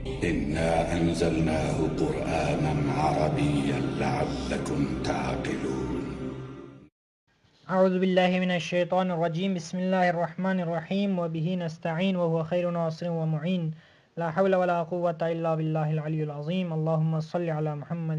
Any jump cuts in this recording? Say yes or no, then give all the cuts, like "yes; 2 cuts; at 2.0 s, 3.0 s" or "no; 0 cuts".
no; 0 cuts